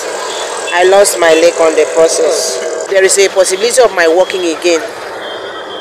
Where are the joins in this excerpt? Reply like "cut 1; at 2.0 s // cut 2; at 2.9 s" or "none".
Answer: cut 1; at 2.9 s